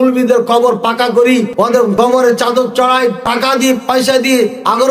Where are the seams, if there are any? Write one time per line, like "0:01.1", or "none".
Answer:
0:01.7
0:03.2